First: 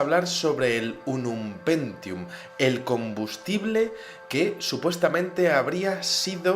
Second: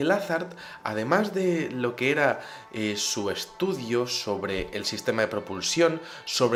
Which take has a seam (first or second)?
first